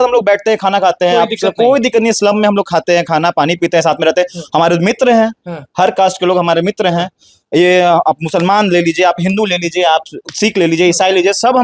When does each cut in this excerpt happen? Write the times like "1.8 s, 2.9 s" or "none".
none